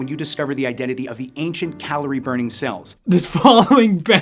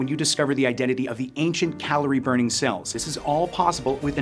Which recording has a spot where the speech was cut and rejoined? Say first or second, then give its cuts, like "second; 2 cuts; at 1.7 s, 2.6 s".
second; 1 cut; at 2.9 s